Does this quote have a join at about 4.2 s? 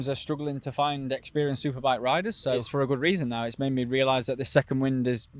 no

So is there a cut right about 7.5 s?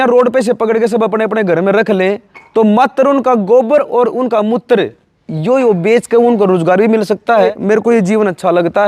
yes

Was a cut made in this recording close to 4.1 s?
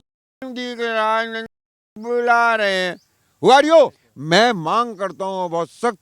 yes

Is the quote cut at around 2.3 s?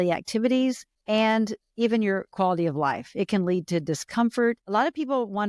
yes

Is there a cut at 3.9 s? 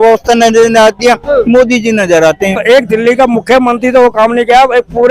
no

